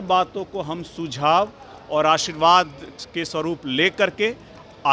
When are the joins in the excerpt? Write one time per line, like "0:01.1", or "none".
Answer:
none